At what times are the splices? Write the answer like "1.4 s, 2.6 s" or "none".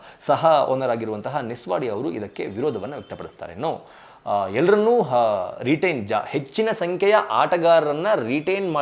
none